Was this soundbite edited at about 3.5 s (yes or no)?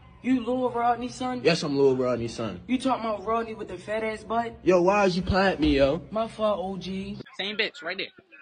no